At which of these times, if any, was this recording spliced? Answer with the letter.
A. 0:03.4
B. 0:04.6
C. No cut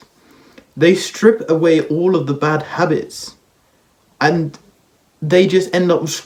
C